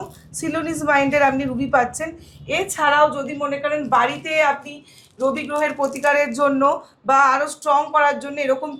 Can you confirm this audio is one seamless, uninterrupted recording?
yes; 0 cuts

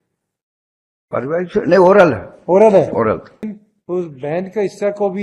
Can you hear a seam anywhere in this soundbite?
yes; 1 cut; at 3.5 s

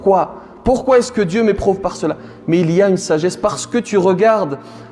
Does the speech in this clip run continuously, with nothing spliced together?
yes; 0 cuts

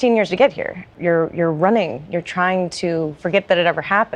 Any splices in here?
yes; 1 cut; at 0.9 s

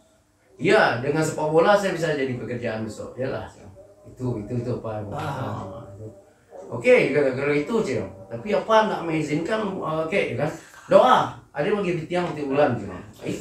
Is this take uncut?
yes; 0 cuts

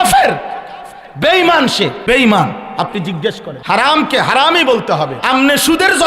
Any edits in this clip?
yes; 3 cuts; at 2.0 s, 3.5 s, 5.2 s

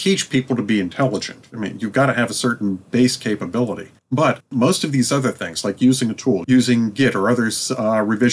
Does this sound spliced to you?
yes; 2 cuts; at 4.4 s, 6.4 s

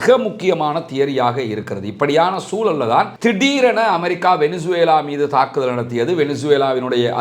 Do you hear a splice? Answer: no; 0 cuts

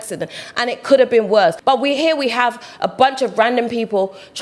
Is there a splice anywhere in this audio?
yes; 1 cut; at 1.6 s

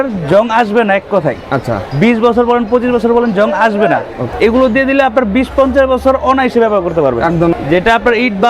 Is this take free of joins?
no; 2 cuts; at 4.2 s, 7.5 s

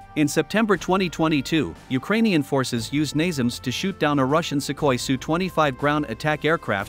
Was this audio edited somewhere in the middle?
no; 0 cuts

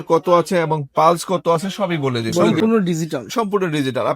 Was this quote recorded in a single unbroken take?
no; 1 cut; at 2.4 s

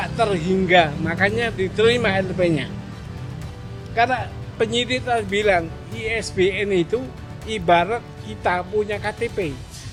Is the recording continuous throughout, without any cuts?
yes; 0 cuts

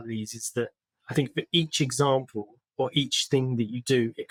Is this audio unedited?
yes; 0 cuts

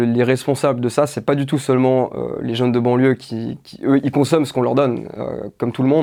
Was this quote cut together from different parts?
no; 0 cuts

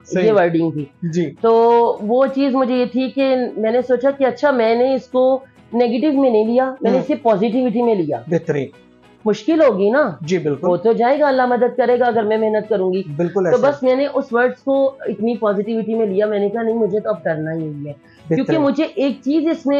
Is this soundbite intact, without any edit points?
yes; 0 cuts

